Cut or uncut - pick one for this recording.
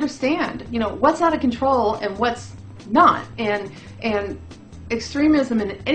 uncut